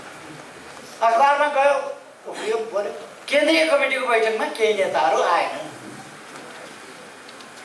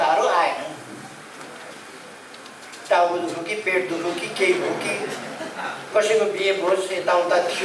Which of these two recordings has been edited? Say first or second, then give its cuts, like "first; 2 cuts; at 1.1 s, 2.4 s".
first; 1 cut; at 3.1 s